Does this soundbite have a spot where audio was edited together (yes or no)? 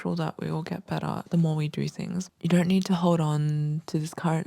yes